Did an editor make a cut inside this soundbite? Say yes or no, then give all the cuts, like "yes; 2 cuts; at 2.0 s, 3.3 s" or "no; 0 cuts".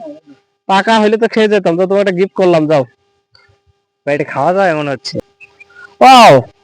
yes; 1 cut; at 5.1 s